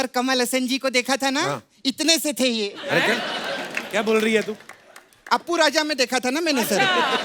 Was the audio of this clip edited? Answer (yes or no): no